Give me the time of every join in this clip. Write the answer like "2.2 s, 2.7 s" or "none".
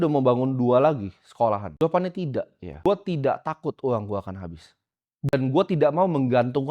1.7 s, 2.6 s, 5.3 s